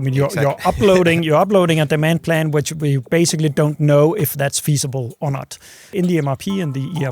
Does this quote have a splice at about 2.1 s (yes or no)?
no